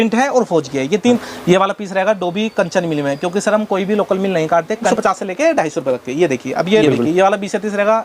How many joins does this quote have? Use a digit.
3